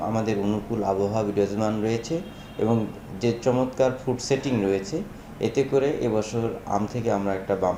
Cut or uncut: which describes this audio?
uncut